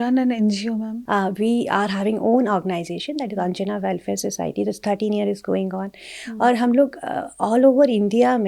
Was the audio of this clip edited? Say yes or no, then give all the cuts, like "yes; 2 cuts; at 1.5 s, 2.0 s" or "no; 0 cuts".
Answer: yes; 1 cut; at 1.0 s